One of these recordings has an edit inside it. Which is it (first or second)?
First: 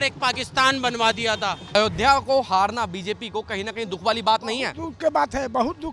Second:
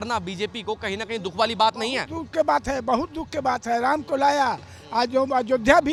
first